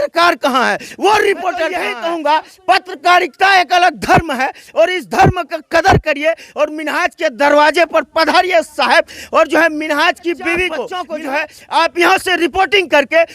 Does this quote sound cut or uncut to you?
cut